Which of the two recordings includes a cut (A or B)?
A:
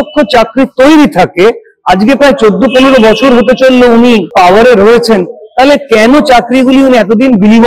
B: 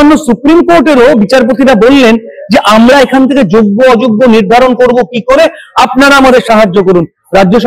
A